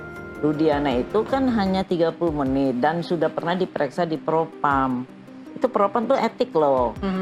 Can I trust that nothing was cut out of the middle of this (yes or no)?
yes